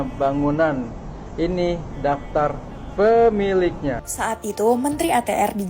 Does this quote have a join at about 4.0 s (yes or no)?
yes